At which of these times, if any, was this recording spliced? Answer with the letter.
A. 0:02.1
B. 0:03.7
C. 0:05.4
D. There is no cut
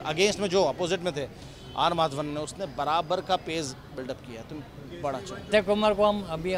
C